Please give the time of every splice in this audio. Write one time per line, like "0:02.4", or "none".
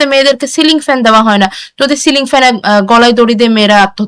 none